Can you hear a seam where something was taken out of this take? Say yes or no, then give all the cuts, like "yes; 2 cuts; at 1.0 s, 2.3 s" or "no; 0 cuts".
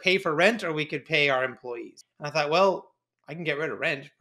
yes; 1 cut; at 1.9 s